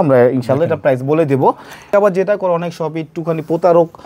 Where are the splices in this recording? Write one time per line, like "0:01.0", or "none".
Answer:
0:01.9